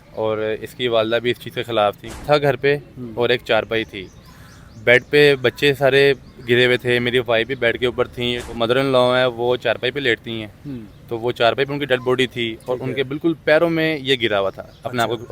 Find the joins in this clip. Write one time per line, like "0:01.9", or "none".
0:02.2
0:08.5